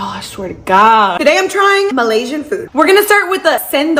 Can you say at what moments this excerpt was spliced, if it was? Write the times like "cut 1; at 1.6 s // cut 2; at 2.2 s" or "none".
none